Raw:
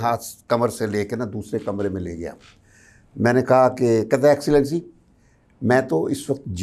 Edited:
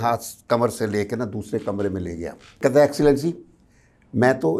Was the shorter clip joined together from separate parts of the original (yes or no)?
yes